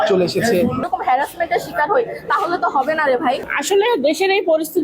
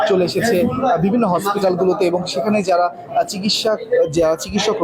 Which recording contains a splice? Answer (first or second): first